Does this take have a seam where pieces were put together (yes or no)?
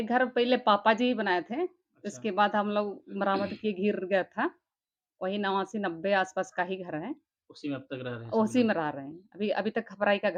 no